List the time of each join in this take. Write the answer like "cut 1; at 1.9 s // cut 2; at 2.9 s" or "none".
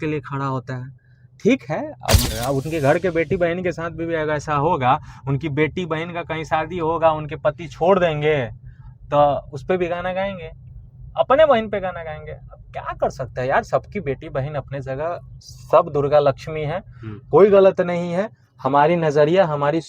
cut 1; at 2.2 s